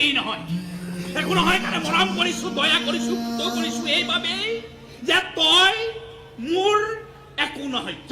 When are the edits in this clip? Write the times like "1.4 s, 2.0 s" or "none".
none